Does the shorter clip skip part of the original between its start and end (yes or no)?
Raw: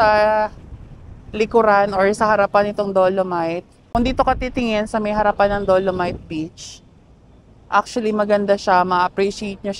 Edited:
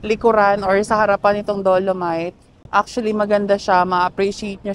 yes